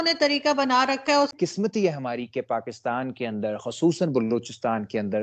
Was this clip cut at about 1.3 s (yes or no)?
yes